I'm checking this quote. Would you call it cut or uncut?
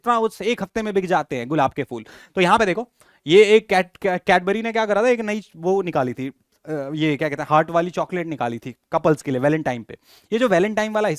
uncut